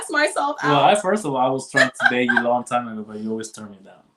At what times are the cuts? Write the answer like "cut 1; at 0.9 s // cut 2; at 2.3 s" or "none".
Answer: none